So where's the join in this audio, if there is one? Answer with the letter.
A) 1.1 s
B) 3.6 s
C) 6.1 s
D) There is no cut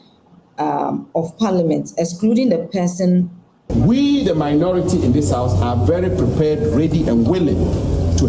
B